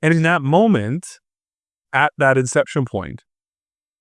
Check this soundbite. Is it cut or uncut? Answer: uncut